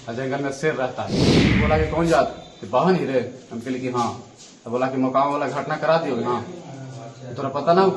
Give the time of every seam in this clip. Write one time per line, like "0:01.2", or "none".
0:01.3

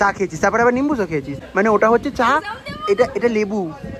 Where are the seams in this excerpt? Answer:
0:01.3

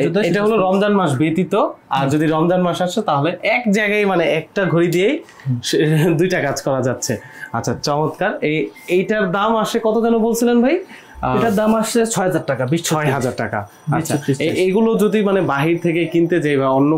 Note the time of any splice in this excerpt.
none

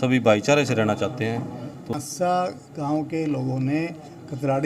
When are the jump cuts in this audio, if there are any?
0:01.9

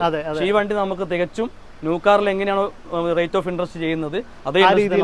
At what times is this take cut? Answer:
none

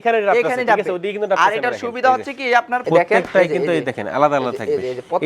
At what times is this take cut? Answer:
0:02.8

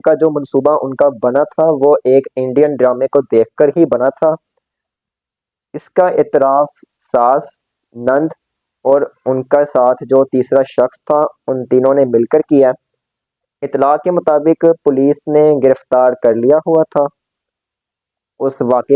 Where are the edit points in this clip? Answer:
none

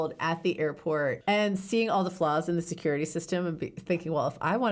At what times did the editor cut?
0:01.2

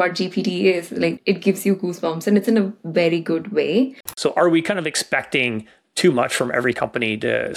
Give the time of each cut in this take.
0:01.2
0:04.1

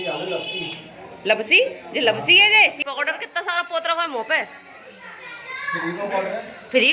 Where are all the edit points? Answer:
0:02.8

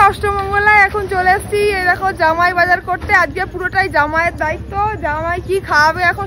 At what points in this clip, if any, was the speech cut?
none

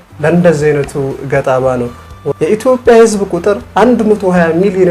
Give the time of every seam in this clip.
0:02.3

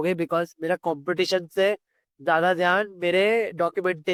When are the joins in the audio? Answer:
none

